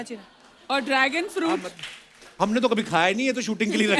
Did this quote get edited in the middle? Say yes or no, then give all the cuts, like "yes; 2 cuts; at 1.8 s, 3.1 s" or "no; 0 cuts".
no; 0 cuts